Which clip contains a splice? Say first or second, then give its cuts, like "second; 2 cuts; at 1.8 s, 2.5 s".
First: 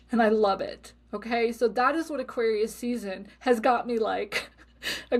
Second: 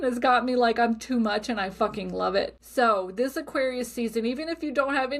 second; 1 cut; at 2.6 s